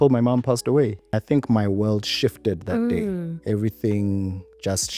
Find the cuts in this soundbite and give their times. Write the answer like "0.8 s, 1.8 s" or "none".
1.1 s